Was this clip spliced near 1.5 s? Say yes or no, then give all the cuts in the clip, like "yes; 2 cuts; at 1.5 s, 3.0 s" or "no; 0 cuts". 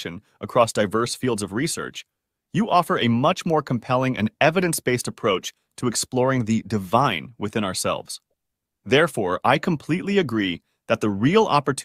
no; 0 cuts